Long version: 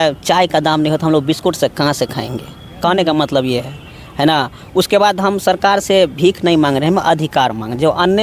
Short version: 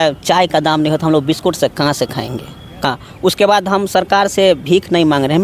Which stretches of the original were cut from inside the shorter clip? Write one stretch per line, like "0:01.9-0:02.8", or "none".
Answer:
0:02.8-0:04.4